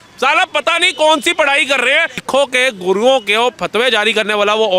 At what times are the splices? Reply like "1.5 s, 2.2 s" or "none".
2.2 s